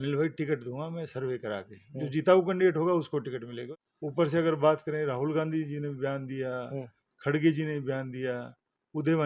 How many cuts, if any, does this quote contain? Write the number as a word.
zero